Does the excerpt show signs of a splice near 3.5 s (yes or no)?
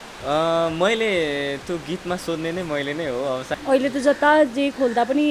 yes